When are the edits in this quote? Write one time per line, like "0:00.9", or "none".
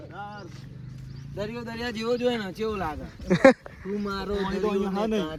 none